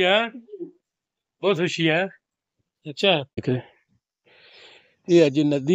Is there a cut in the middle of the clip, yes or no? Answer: yes